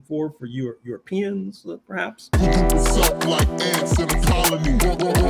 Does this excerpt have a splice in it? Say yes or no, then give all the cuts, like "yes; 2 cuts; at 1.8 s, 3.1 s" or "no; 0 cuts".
yes; 1 cut; at 2.3 s